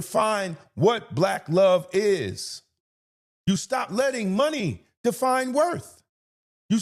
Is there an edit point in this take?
no; 0 cuts

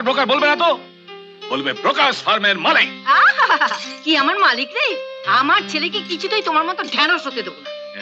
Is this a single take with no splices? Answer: yes; 0 cuts

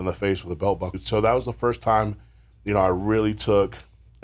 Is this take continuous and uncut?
no; 1 cut; at 0.9 s

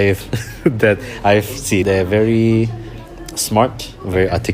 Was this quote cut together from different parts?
yes; 1 cut; at 1.8 s

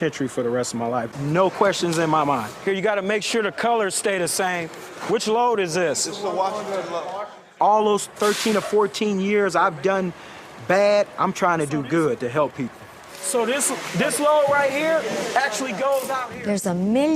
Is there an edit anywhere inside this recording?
no; 0 cuts

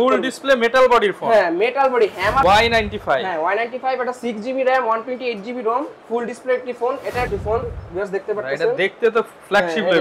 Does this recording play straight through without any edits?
no; 2 cuts; at 2.4 s, 7.3 s

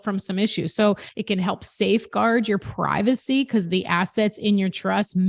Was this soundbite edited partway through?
yes; 1 cut; at 1.1 s

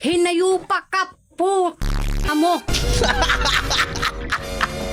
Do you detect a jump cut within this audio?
no; 0 cuts

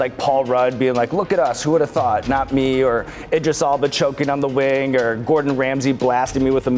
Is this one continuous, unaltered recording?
yes; 0 cuts

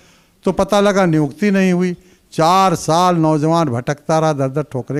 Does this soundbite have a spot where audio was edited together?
no; 0 cuts

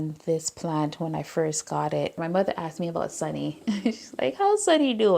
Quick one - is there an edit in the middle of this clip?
yes; 1 cut; at 2.2 s

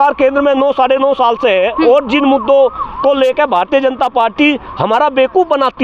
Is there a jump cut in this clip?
no; 0 cuts

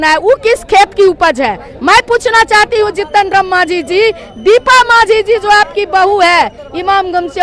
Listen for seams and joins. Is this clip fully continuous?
yes; 0 cuts

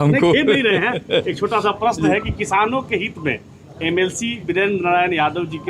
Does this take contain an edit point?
no; 0 cuts

